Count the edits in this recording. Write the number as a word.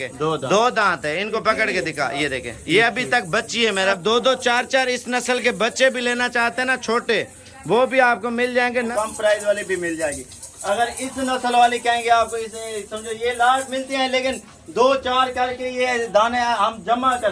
two